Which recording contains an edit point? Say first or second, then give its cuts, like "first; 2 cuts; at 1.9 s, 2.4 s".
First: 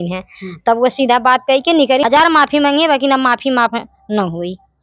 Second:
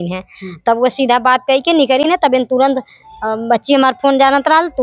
first; 1 cut; at 2.0 s